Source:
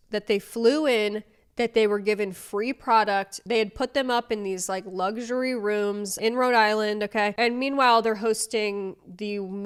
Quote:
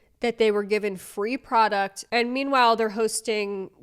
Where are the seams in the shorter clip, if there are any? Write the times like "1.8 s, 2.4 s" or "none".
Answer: 2.1 s